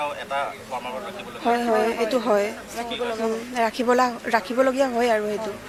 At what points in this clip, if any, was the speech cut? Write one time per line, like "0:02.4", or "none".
none